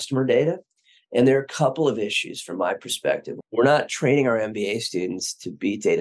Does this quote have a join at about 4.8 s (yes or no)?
no